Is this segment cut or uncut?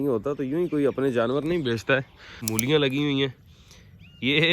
cut